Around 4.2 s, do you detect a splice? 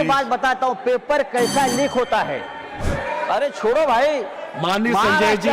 no; 1 cut; at 2.7 s

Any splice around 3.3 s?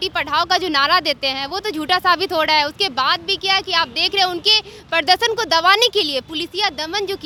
no; 0 cuts

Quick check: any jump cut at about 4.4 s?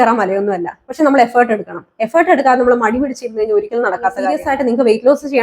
yes; 1 cut; at 4.4 s

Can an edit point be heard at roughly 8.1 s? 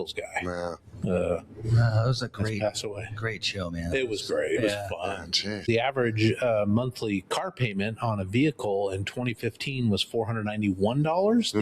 no; 1 cut; at 5.6 s

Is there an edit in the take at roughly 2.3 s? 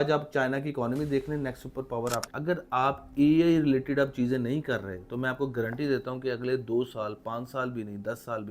yes; 1 cut; at 2.3 s

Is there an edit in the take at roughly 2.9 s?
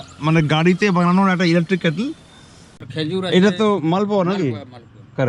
yes; 1 cut; at 2.9 s

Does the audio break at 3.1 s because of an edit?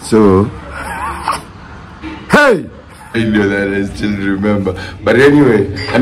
yes; 1 cut; at 3.1 s

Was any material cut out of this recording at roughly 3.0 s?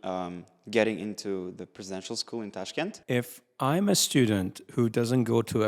yes; 1 cut; at 3.0 s

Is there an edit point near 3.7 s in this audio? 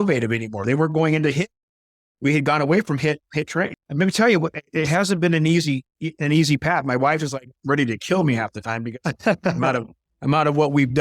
yes; 1 cut; at 3.7 s

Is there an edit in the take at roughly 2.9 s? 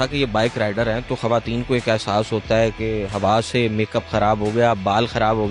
no; 0 cuts

